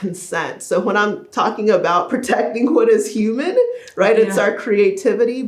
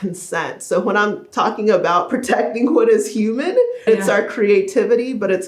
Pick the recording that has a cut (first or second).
second